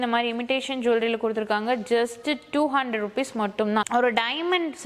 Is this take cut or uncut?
cut